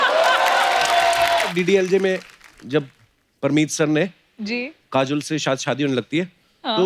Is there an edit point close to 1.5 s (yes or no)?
yes